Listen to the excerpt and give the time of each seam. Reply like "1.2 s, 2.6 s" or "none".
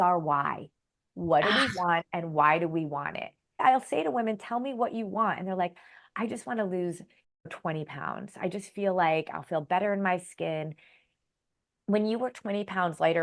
3.6 s, 11.1 s

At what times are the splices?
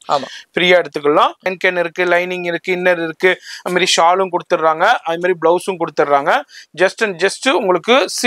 1.5 s

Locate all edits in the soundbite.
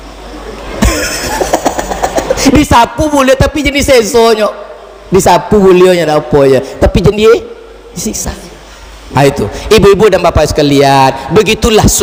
none

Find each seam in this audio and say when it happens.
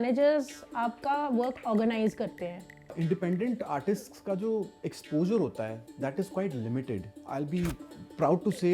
3.0 s, 7.1 s

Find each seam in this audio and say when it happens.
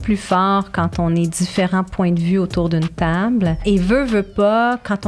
3.6 s

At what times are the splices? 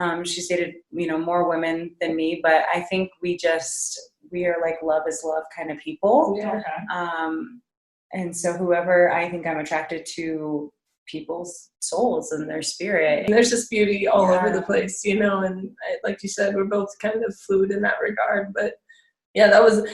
13.3 s

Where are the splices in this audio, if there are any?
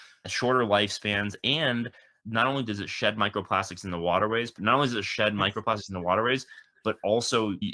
4.5 s

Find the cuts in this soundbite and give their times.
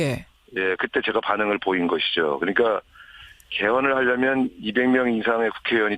4.4 s

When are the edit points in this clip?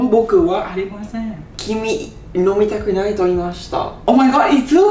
1.5 s, 3.9 s

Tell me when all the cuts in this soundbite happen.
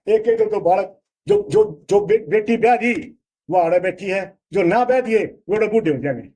none

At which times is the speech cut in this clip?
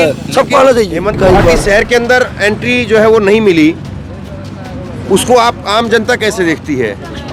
1.1 s

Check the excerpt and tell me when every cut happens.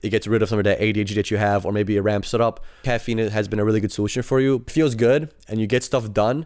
2.8 s, 4.7 s

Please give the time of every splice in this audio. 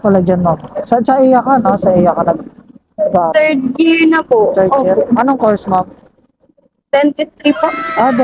none

